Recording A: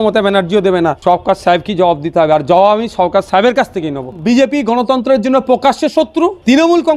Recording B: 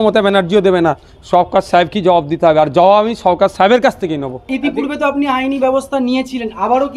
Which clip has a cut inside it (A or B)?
A